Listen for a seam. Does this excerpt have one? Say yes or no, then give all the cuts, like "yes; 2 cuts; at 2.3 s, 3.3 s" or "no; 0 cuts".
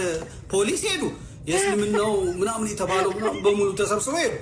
no; 0 cuts